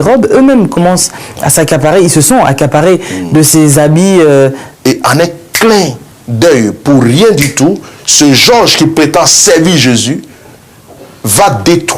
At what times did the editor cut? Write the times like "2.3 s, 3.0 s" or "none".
4.6 s